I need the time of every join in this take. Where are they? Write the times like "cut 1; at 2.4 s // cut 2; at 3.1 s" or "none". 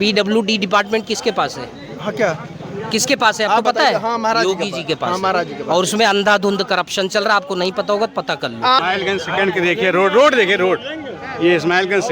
cut 1; at 8.8 s